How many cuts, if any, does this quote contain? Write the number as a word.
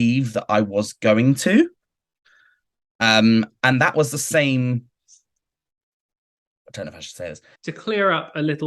one